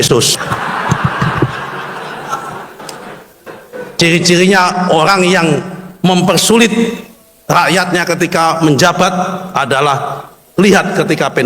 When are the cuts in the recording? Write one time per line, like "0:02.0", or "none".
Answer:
0:04.0